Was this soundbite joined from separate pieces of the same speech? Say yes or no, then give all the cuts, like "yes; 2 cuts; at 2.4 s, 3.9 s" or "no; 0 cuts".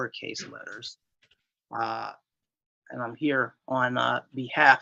no; 0 cuts